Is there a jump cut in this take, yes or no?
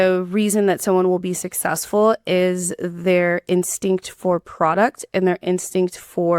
no